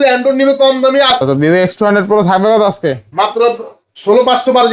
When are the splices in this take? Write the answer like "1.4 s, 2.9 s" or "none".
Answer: 1.1 s